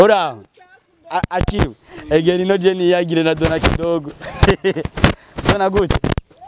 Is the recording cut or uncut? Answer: uncut